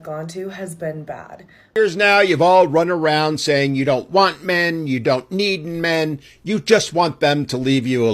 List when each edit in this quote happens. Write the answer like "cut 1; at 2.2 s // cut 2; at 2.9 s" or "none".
cut 1; at 1.7 s